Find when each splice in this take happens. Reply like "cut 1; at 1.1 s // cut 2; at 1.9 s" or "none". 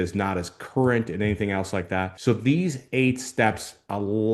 cut 1; at 2.1 s